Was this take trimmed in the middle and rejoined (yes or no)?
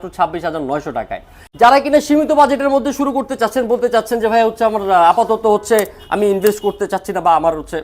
yes